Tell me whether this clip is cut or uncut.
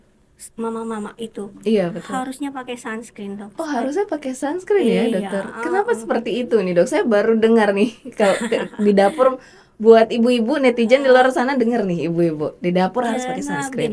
uncut